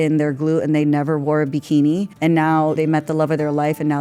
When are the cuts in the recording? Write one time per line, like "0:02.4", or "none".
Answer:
0:02.8